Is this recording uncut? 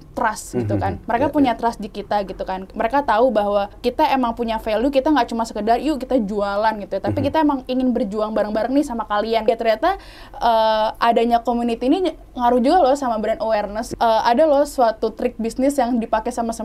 no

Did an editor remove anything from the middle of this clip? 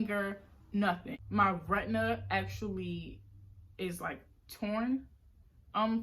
yes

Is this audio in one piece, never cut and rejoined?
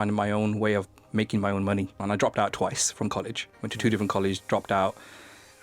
no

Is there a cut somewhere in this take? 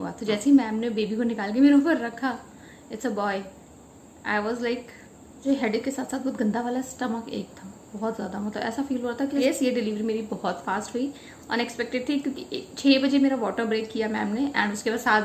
yes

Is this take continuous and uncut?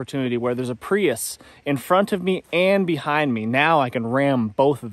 yes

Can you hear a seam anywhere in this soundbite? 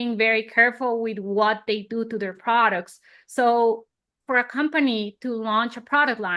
no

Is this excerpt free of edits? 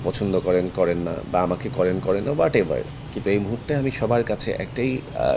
yes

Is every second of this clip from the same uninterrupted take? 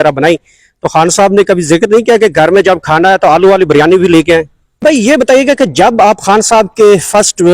no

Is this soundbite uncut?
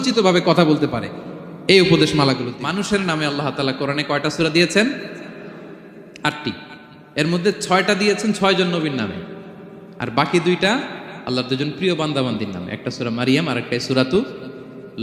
no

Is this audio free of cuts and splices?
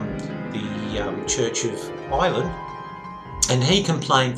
yes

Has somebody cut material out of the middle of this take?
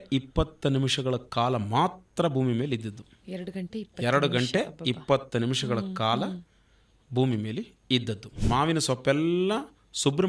yes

